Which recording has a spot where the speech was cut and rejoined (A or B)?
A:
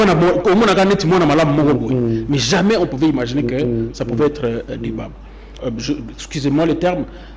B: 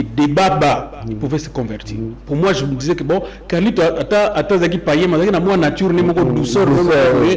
A